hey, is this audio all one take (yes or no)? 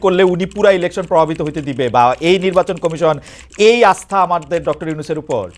yes